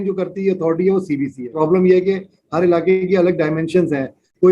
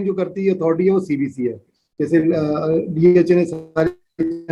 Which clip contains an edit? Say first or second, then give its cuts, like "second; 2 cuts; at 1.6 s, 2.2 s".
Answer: first; 1 cut; at 1.4 s